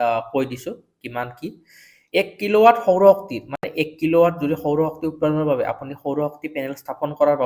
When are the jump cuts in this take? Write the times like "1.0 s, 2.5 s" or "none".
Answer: none